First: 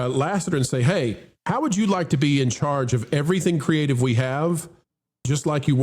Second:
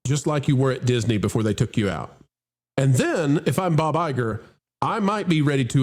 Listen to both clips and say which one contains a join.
first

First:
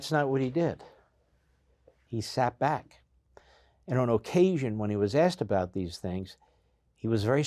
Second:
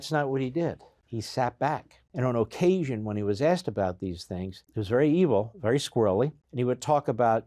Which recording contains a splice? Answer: second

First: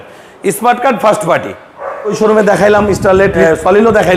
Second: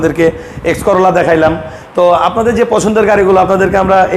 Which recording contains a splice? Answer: first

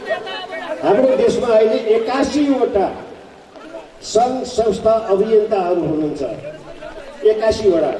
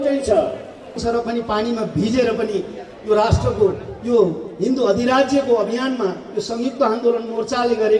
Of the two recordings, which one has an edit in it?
second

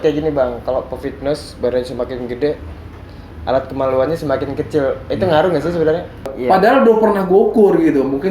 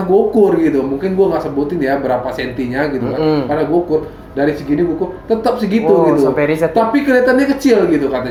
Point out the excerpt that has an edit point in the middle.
first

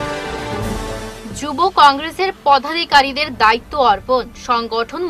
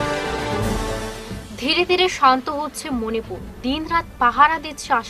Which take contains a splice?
first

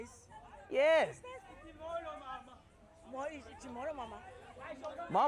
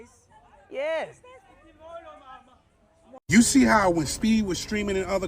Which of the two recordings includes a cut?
second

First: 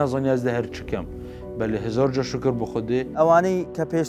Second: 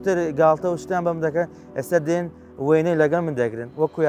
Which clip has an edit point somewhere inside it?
first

